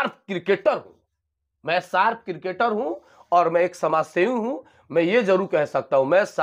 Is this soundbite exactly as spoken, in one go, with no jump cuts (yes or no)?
yes